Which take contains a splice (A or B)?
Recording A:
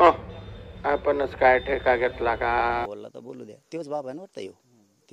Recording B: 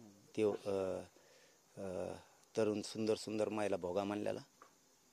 A